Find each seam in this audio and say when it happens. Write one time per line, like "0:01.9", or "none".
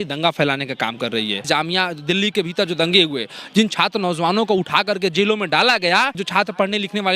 0:01.4
0:06.2